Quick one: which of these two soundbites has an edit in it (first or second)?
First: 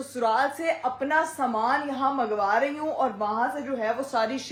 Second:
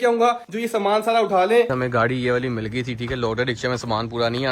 second